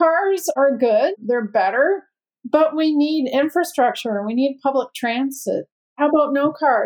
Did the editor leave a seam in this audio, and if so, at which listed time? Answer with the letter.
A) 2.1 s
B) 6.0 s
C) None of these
B